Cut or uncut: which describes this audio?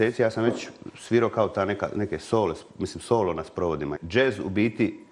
cut